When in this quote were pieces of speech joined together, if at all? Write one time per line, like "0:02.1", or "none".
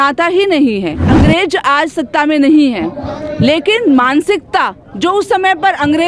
0:01.0